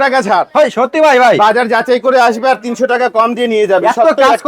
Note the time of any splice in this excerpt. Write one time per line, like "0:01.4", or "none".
none